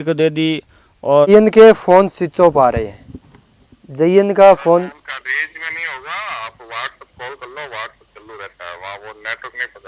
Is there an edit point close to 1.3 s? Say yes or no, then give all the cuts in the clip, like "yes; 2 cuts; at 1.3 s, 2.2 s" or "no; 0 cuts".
yes; 1 cut; at 1.3 s